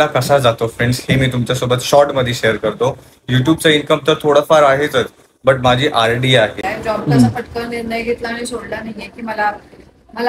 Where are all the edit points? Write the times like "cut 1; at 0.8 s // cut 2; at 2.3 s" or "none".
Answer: cut 1; at 6.7 s